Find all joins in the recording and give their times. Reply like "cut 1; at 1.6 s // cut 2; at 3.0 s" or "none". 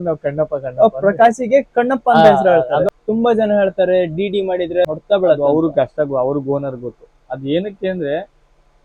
cut 1; at 2.9 s // cut 2; at 4.8 s